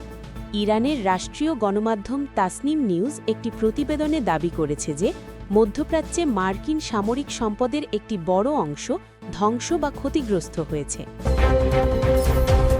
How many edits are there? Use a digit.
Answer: 1